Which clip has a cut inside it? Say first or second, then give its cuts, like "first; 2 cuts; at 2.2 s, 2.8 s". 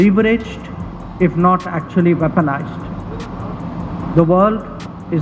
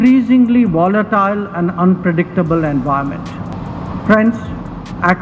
second; 1 cut; at 3.6 s